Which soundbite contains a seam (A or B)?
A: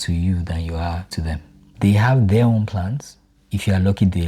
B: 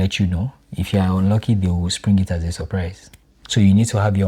A